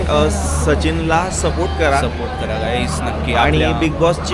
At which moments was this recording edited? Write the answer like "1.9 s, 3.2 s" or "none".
none